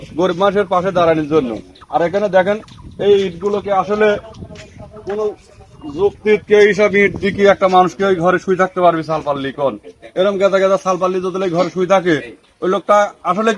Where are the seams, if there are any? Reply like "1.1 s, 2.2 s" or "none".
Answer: none